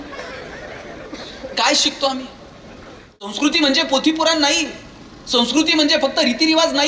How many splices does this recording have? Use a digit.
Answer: 1